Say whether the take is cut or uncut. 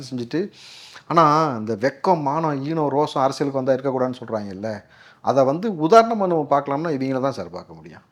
uncut